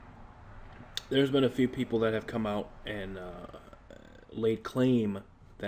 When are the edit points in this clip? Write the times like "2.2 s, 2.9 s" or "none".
none